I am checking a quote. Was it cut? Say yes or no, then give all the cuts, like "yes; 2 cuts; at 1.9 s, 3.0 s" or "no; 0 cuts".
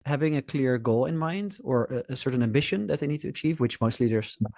no; 0 cuts